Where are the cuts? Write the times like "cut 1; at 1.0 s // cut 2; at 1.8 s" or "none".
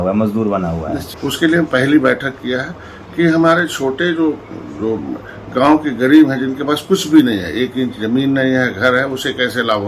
cut 1; at 1.0 s

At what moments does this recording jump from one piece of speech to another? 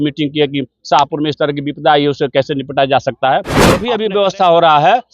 cut 1; at 3.8 s

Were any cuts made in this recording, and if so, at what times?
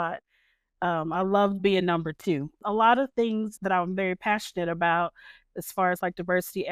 cut 1; at 2.6 s // cut 2; at 3.5 s

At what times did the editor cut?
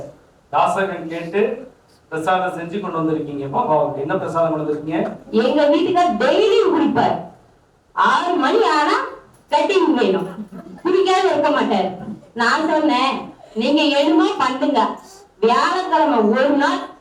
cut 1; at 5.4 s

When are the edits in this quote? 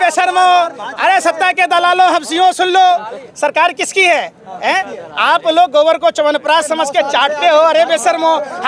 cut 1; at 3.2 s

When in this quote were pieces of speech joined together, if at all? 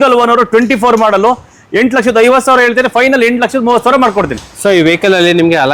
none

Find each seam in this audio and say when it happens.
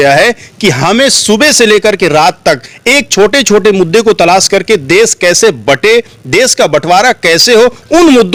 none

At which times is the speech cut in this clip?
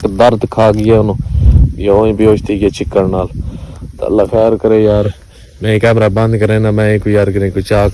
none

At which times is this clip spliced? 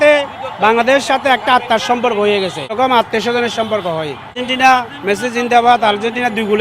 cut 1; at 2.7 s // cut 2; at 4.4 s

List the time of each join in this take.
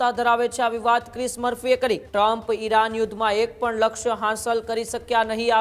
cut 1; at 2.0 s

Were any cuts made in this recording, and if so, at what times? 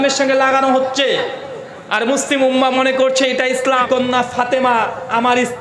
cut 1; at 3.8 s

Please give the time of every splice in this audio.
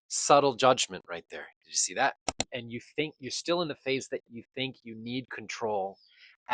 cut 1; at 2.3 s

